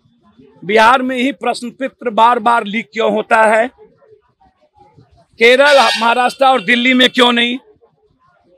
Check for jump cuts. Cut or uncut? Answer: uncut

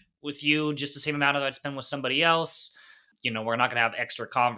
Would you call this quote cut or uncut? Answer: cut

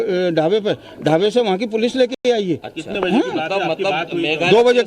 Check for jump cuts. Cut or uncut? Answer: uncut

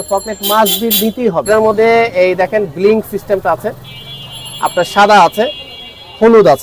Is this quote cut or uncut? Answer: cut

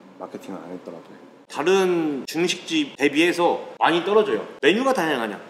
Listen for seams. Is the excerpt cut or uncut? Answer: cut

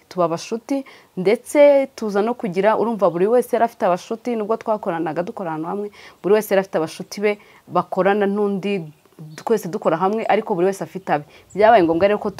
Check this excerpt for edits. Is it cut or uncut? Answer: uncut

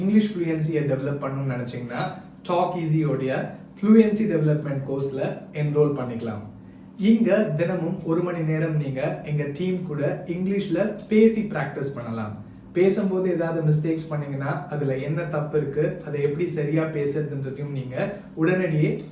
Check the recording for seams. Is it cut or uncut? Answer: uncut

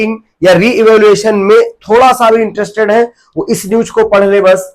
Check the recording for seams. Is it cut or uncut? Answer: uncut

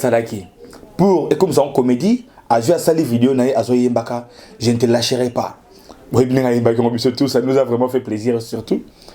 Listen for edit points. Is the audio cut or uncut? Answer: uncut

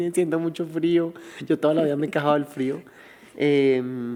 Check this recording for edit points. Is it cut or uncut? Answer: uncut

